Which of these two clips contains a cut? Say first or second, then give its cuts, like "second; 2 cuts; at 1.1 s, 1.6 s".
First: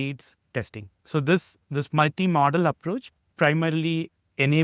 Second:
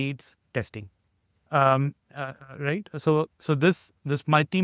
first; 2 cuts; at 1.0 s, 3.2 s